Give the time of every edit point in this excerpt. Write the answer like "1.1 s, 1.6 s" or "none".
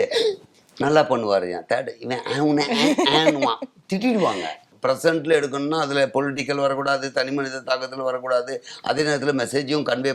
4.7 s